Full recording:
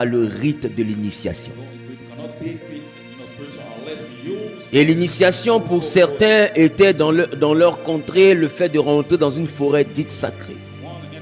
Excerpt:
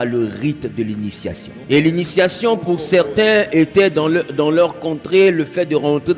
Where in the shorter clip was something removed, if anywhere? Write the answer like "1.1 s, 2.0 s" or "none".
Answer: 1.5 s